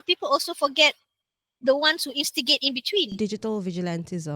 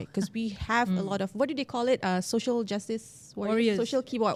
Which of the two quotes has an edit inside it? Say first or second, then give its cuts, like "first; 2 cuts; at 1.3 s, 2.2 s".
first; 1 cut; at 3.1 s